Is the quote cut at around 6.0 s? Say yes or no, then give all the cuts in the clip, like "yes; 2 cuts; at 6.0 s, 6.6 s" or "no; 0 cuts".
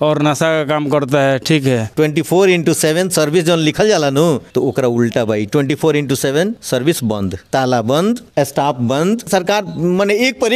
no; 2 cuts; at 1.9 s, 9.3 s